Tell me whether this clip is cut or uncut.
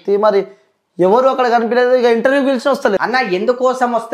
cut